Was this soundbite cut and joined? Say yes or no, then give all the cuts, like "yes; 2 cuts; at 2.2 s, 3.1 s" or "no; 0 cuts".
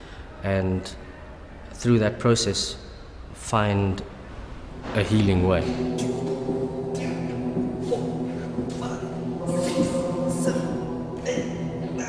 yes; 1 cut; at 10.6 s